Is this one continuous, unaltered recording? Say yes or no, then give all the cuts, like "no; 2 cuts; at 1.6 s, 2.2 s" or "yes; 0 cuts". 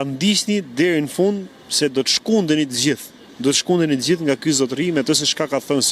yes; 0 cuts